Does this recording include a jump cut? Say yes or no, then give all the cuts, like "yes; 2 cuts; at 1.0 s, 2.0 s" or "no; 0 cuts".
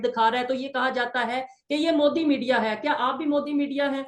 no; 0 cuts